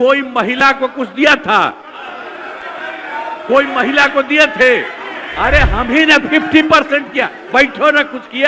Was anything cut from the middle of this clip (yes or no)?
no